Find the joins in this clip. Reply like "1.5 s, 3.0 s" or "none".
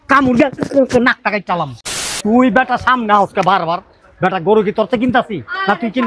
1.9 s